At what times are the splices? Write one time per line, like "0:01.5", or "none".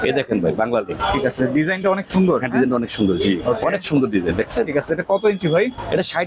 0:00.9